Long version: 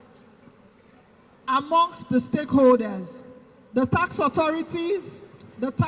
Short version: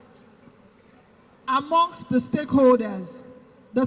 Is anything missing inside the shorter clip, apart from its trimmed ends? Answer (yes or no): no